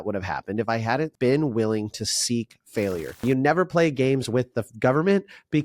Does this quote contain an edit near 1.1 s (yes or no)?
no